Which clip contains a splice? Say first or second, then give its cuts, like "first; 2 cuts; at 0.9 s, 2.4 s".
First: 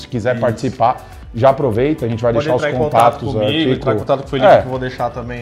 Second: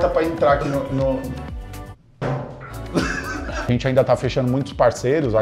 second; 1 cut; at 3.5 s